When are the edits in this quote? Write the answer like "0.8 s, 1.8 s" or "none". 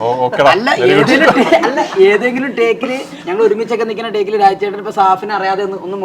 none

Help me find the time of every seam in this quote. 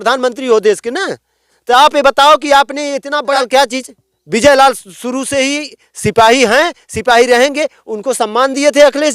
3.4 s

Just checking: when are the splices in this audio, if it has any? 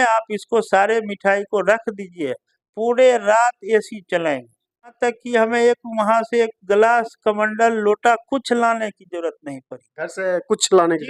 4.9 s

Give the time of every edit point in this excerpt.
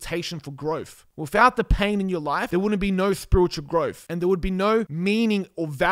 1.0 s, 2.4 s, 4.0 s, 4.9 s

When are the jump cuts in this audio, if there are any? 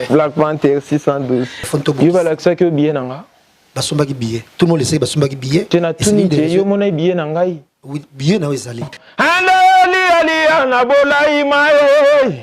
1.6 s, 9.0 s

